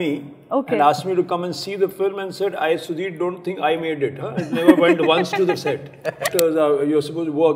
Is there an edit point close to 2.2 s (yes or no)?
no